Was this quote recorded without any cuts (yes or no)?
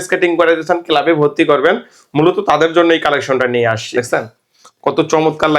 no